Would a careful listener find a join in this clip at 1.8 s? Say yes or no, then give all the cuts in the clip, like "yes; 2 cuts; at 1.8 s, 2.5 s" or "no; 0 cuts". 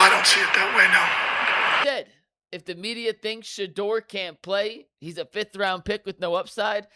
yes; 1 cut; at 1.8 s